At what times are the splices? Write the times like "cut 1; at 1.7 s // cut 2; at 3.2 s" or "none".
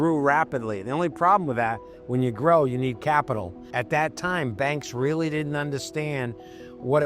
cut 1; at 3.7 s

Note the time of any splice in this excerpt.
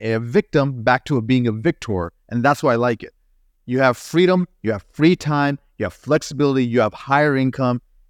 none

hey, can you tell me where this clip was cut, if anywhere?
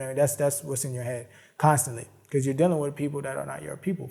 none

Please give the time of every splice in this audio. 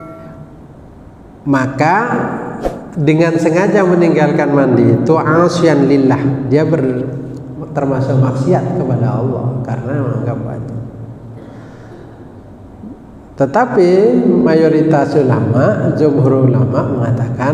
none

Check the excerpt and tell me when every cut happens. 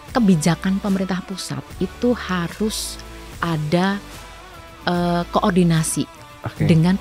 none

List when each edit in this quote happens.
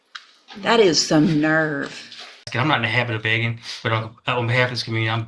cut 1; at 2.5 s

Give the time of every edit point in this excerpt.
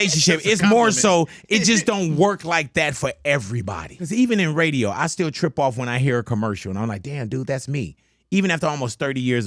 cut 1; at 4.1 s

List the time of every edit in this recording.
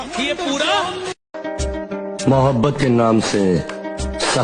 cut 1; at 1.2 s

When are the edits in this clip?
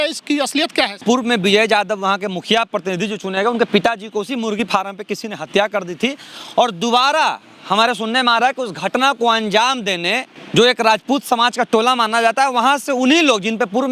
cut 1; at 1.0 s // cut 2; at 10.3 s

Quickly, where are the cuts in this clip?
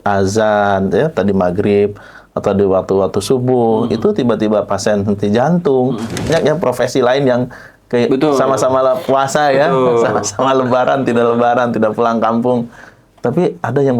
cut 1; at 6.3 s

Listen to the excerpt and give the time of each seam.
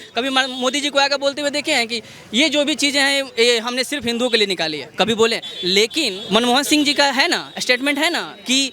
cut 1; at 6.2 s

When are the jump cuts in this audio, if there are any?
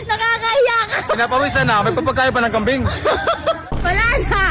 cut 1; at 3.6 s

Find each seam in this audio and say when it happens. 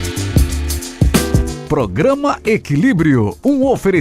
cut 1; at 1.2 s

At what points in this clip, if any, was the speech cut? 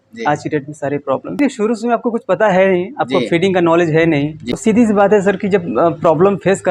cut 1; at 1.4 s // cut 2; at 4.4 s

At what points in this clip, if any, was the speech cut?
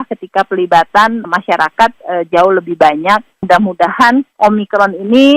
cut 1; at 3.3 s // cut 2; at 4.3 s

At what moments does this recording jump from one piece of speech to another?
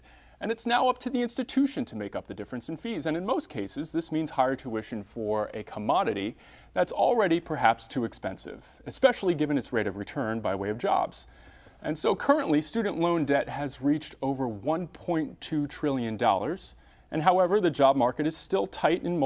none

